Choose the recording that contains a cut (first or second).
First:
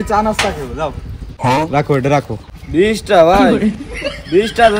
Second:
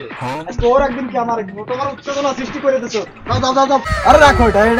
second